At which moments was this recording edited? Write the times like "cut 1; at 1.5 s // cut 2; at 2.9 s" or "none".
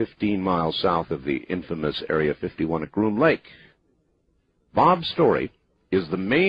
cut 1; at 2.5 s